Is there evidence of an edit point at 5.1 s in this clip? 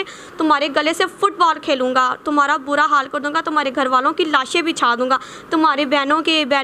no; 0 cuts

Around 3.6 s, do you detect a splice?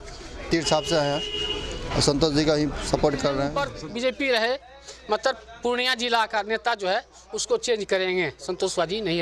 yes; 1 cut; at 3.6 s

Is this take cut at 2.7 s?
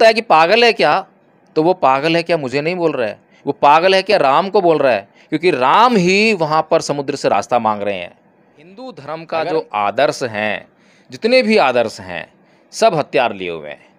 no; 1 cut; at 8.2 s

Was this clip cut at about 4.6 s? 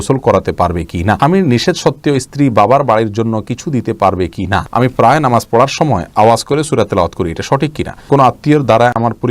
yes; 3 cuts; at 1.2 s, 4.6 s, 8.1 s

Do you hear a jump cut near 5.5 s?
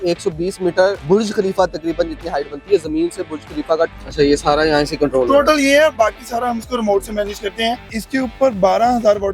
no; 3 cuts; at 1.0 s, 3.9 s, 8.0 s

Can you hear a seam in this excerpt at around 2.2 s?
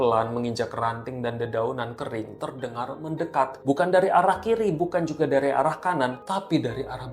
no; 2 cuts; at 3.6 s, 6.2 s

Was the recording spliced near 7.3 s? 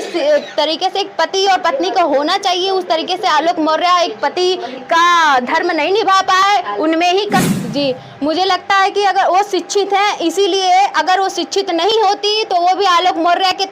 yes; 1 cut; at 7.3 s

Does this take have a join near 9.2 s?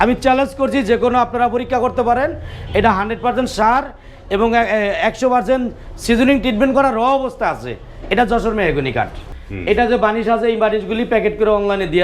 yes; 1 cut; at 9.2 s

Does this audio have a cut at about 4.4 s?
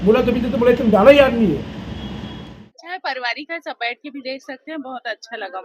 no; 1 cut; at 2.7 s

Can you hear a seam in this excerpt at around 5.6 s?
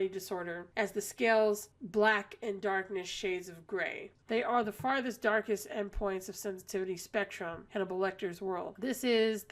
no; 2 cuts; at 4.1 s, 8.7 s

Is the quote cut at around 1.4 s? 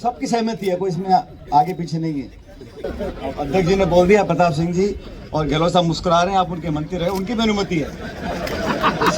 no; 1 cut; at 2.8 s

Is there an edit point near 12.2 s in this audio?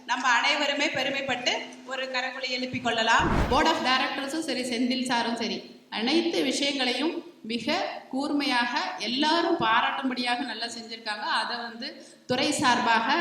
no; 1 cut; at 3.4 s

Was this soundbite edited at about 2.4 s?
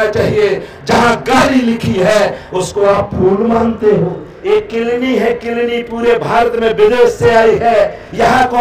no; 1 cut; at 4.3 s

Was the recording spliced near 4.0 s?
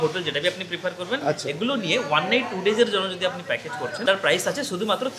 yes; 1 cut; at 4.0 s

